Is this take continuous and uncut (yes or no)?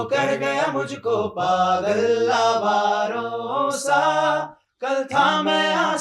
yes